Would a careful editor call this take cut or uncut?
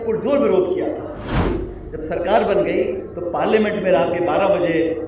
cut